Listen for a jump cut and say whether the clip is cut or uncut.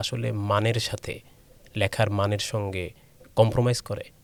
uncut